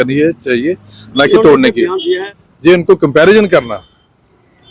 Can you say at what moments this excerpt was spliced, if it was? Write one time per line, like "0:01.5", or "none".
0:02.3